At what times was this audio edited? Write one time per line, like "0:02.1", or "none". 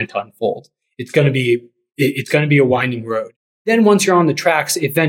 none